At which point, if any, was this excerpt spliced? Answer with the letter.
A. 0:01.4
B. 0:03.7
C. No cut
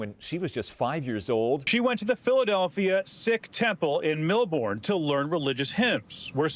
C